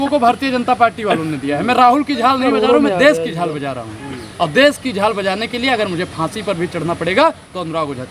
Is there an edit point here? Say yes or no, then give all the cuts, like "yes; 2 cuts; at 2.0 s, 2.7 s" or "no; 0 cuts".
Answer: no; 0 cuts